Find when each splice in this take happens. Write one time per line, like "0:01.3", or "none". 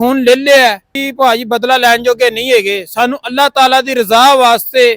0:01.0